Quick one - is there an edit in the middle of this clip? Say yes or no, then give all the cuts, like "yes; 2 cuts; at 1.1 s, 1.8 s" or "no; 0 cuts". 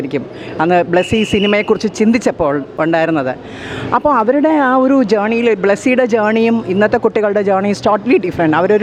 no; 0 cuts